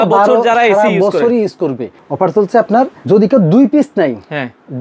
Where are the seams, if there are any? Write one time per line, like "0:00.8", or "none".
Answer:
0:01.9
0:03.0